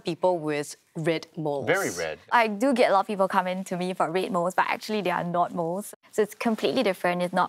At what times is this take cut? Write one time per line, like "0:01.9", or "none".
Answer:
0:02.3
0:05.8